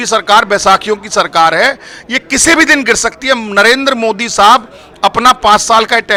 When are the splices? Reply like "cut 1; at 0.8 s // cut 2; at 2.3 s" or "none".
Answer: none